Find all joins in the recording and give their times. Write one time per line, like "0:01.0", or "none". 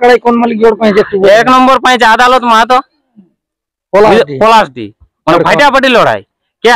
none

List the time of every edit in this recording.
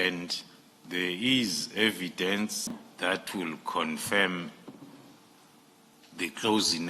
0:02.9

